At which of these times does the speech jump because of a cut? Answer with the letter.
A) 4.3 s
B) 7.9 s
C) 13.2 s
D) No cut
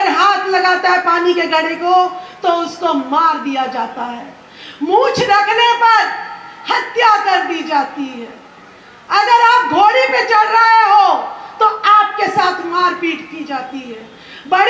D